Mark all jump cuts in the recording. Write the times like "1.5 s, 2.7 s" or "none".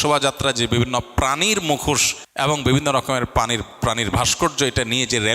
2.2 s